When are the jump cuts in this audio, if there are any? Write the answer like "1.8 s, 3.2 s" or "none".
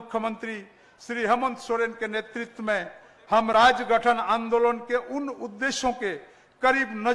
none